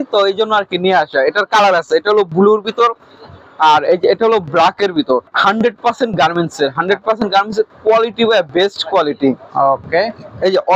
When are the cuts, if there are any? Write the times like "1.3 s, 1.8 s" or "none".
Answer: 5.3 s